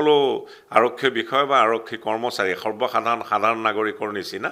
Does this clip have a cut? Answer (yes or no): no